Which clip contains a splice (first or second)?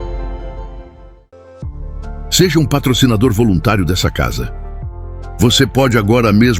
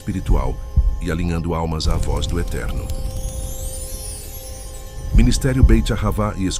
first